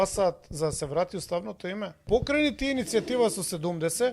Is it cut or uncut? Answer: cut